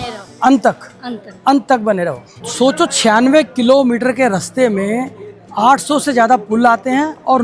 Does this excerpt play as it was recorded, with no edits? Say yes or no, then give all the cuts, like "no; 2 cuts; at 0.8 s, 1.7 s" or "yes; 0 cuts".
yes; 0 cuts